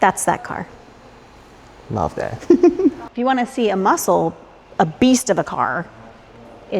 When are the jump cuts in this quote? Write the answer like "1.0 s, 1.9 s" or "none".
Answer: 3.1 s